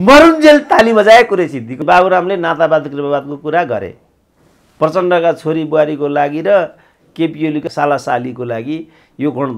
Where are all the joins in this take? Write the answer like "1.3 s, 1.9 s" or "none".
1.8 s, 7.6 s